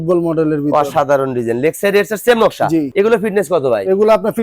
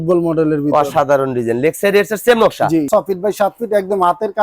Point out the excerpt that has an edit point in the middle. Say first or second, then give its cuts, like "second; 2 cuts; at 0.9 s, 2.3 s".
second; 1 cut; at 2.9 s